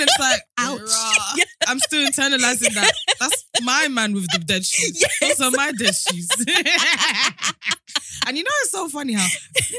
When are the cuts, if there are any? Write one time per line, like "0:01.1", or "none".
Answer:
none